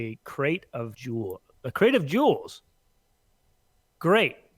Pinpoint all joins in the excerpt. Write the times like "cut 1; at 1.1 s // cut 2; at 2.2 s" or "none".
cut 1; at 1.0 s